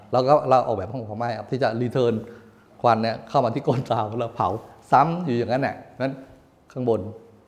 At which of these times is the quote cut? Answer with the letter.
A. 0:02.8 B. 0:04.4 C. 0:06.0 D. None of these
D